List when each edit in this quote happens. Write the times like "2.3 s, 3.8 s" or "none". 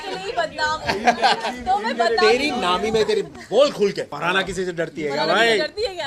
4.1 s